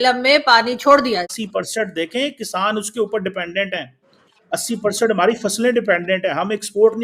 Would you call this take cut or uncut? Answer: cut